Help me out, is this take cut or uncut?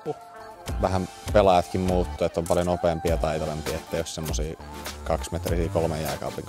uncut